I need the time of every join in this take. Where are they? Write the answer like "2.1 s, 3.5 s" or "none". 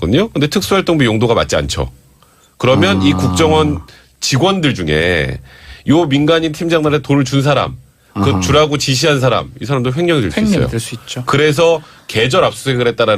12.0 s